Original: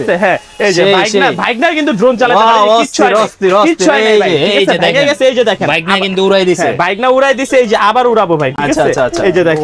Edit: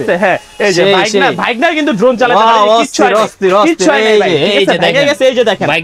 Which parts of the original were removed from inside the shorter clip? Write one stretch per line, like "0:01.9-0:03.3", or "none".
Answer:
none